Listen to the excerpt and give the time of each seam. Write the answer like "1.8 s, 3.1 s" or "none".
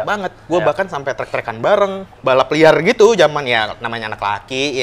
2.1 s